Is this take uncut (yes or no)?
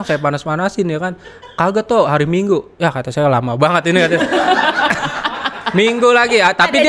yes